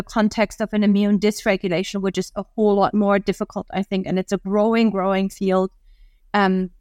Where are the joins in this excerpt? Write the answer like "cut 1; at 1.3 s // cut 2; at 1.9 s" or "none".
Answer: none